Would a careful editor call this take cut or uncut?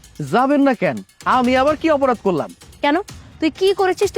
uncut